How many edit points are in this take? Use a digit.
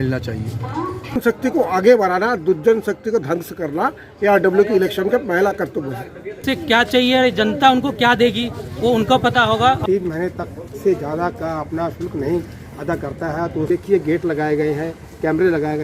4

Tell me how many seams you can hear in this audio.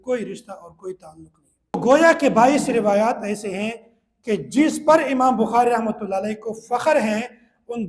1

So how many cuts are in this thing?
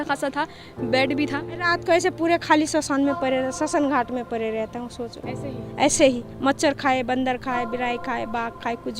1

